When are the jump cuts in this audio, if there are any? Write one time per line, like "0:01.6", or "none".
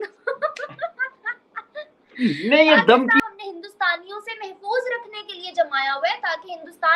0:03.2